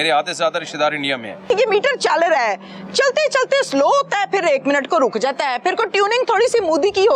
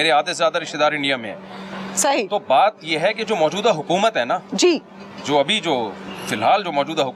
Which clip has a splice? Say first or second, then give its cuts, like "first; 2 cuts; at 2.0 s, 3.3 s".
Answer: first; 1 cut; at 1.5 s